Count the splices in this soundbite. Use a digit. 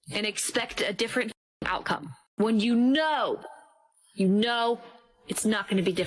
1